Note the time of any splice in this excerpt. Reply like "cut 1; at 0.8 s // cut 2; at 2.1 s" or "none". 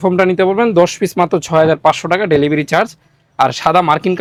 none